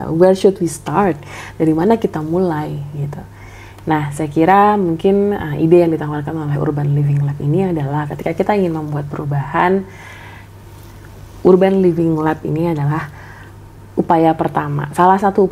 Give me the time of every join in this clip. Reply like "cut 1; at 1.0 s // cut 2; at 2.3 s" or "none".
none

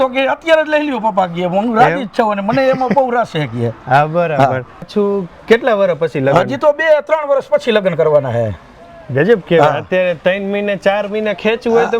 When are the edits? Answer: none

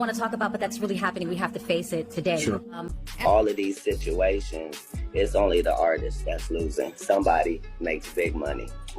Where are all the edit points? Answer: cut 1; at 2.9 s

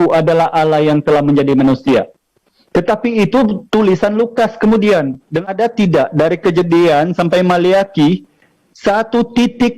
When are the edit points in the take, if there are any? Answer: cut 1; at 5.4 s

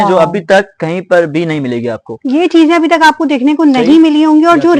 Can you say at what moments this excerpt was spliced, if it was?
none

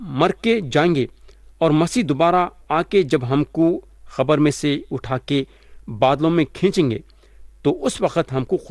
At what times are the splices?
none

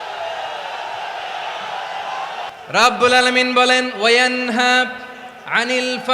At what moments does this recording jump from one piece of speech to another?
none

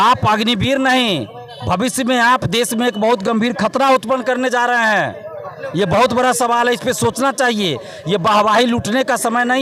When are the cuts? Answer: none

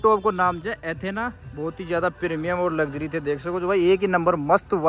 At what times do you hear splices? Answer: none

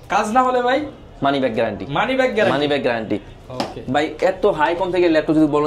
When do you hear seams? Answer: none

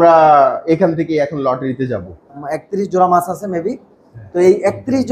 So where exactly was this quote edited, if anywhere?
cut 1; at 2.2 s

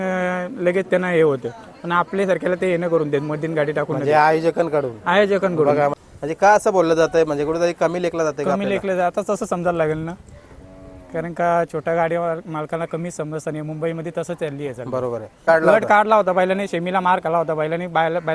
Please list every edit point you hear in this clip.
cut 1; at 6.0 s // cut 2; at 15.5 s

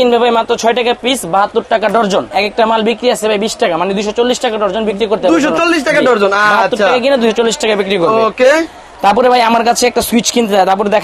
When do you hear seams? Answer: none

